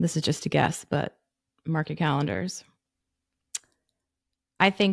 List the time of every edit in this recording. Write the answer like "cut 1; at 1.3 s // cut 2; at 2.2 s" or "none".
none